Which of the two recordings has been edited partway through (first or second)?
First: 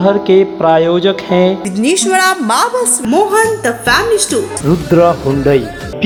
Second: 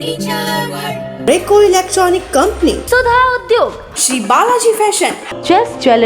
second